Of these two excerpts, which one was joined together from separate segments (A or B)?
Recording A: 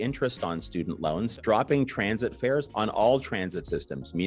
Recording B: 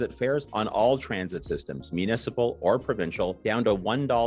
A